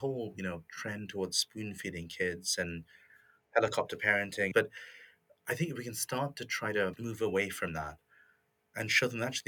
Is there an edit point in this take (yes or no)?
yes